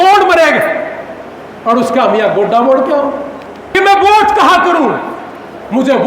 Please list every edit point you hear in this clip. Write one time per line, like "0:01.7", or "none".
0:03.7